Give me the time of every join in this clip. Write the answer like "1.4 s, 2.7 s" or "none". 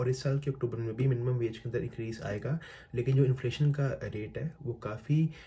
none